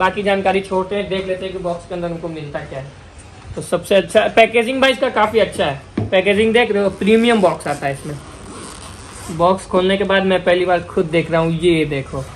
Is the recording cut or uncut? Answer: uncut